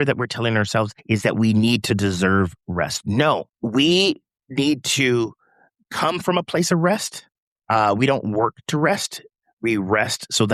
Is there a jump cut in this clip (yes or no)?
yes